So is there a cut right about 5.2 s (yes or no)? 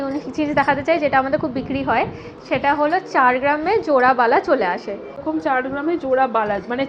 yes